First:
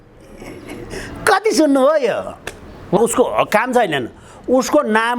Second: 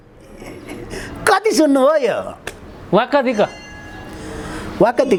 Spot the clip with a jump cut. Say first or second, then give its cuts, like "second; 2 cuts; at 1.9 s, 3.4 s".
first; 1 cut; at 3.0 s